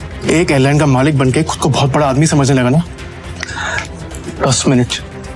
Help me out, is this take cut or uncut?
uncut